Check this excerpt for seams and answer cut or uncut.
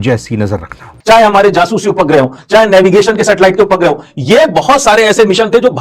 cut